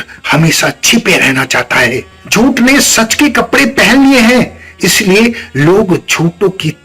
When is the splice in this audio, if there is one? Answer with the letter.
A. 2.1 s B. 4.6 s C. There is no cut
A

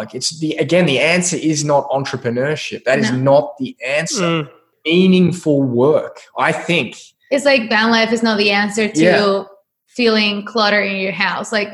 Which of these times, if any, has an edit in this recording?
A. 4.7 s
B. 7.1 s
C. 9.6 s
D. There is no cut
A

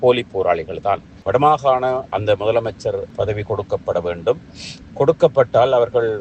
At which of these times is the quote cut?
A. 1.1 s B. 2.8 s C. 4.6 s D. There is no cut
A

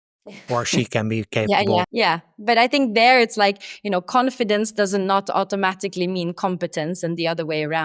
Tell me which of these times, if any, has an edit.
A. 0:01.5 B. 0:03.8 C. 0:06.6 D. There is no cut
A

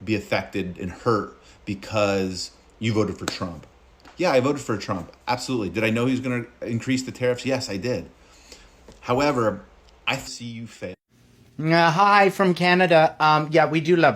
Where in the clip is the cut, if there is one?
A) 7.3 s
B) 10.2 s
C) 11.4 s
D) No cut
B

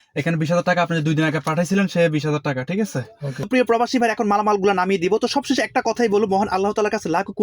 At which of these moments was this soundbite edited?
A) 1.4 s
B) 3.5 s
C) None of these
B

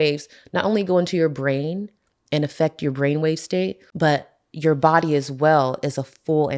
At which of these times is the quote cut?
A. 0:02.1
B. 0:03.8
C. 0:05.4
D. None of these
B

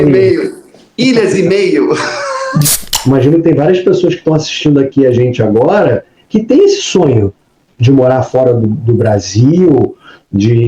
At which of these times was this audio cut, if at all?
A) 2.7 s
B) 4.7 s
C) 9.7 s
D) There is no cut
A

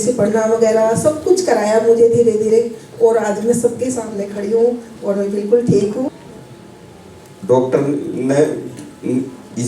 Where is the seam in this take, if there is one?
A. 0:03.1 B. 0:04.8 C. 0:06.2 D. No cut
C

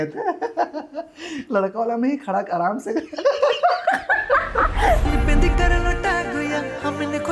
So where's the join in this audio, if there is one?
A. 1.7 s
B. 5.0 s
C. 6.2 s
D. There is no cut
B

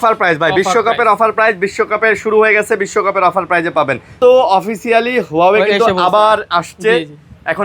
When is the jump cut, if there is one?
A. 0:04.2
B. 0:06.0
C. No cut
A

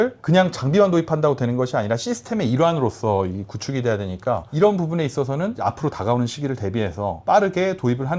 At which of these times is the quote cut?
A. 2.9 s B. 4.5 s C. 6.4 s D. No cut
D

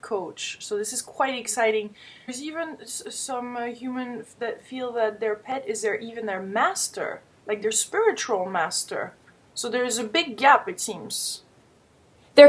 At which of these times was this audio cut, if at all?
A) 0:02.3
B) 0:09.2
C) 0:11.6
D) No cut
D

